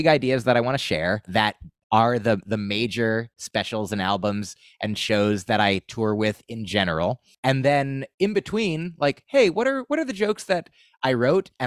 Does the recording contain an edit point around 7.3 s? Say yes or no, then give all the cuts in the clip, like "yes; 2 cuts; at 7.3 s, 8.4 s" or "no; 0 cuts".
yes; 2 cuts; at 1.3 s, 7.3 s